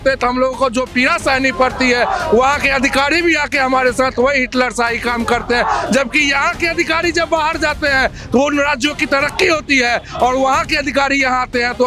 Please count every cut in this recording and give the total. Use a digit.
0